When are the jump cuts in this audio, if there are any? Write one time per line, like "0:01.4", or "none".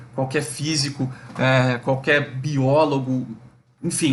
none